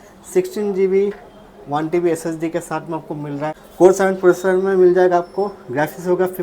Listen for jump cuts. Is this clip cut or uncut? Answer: cut